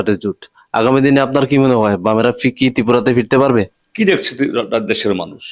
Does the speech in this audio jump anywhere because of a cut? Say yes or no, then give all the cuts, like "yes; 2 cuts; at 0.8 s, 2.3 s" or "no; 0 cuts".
yes; 1 cut; at 3.8 s